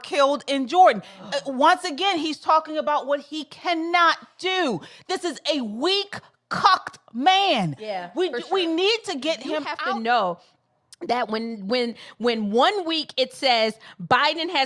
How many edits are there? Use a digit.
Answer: 1